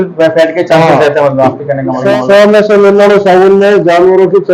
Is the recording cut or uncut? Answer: uncut